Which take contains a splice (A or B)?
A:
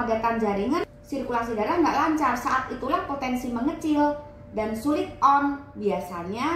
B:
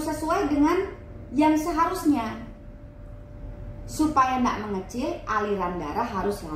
A